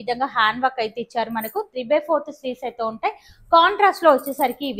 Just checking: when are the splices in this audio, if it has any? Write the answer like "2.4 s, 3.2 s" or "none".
none